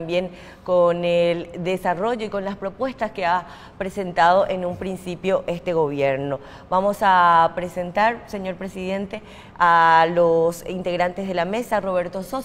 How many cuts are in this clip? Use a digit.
1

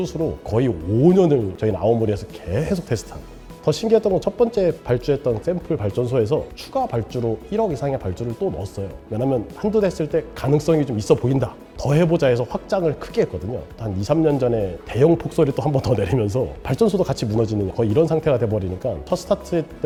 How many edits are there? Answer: 0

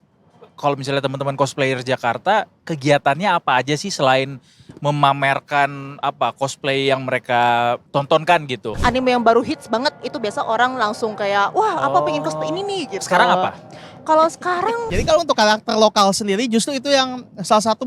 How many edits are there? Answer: 3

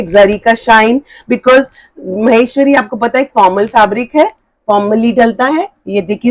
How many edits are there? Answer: 0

